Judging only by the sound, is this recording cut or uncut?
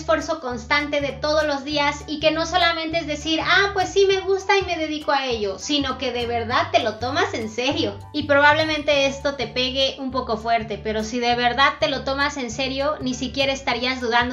uncut